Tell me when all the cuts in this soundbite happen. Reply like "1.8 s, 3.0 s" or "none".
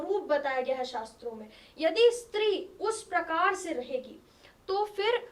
none